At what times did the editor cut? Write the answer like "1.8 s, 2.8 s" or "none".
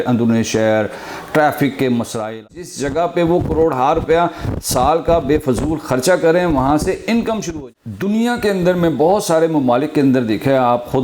2.4 s, 7.5 s